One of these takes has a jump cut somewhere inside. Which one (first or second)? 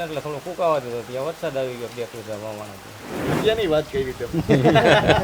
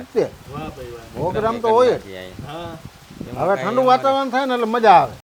first